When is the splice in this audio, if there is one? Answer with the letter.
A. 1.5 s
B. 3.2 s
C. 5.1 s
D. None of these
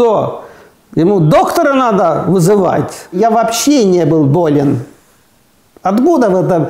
B